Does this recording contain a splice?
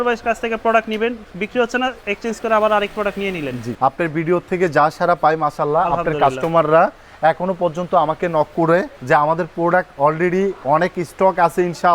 yes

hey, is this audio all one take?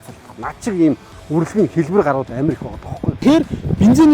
no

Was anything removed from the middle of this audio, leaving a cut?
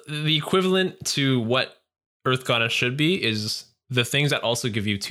no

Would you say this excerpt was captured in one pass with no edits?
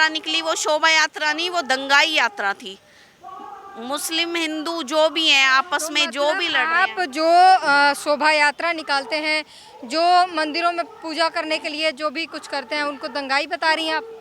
yes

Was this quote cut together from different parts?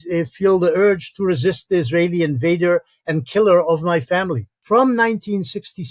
yes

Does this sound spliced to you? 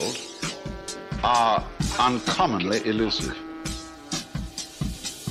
no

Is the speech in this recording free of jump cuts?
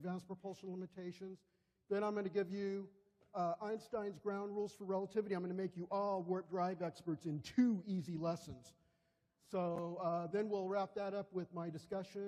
yes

